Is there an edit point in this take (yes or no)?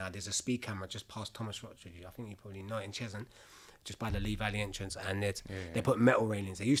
no